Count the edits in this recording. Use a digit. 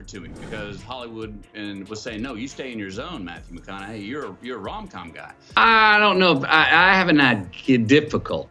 1